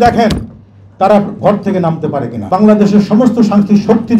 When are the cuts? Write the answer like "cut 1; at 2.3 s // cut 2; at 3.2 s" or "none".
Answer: cut 1; at 2.5 s

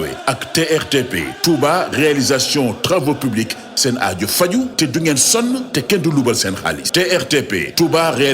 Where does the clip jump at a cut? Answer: cut 1; at 6.8 s

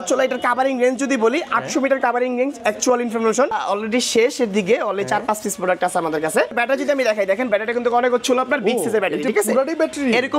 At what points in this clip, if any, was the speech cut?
cut 1; at 3.6 s // cut 2; at 6.6 s

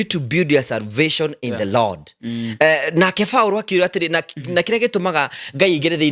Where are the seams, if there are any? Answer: none

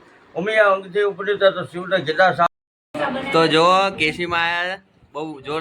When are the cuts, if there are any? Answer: cut 1; at 2.5 s

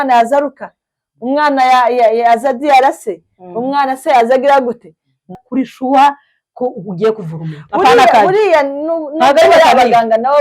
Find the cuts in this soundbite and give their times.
cut 1; at 5.4 s

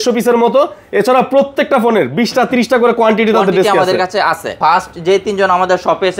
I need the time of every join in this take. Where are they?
cut 1; at 4.5 s

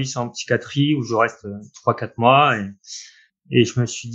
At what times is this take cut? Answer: cut 1; at 3.0 s

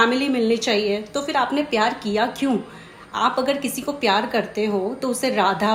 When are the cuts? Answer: none

